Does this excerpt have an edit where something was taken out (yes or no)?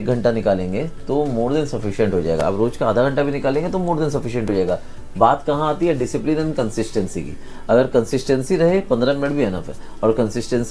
no